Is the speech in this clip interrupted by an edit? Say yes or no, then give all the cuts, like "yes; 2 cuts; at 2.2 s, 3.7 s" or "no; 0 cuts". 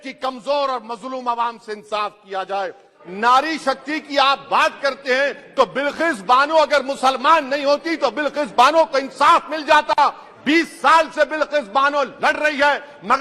yes; 1 cut; at 3.0 s